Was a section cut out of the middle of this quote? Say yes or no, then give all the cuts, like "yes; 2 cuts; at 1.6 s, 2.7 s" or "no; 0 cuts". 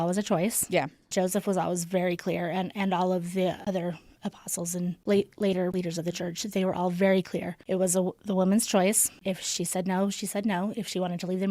yes; 5 cuts; at 3.6 s, 5.0 s, 5.7 s, 7.6 s, 9.1 s